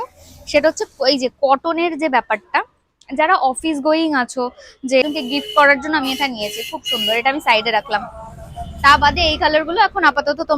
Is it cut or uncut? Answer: cut